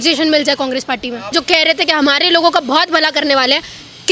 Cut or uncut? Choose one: cut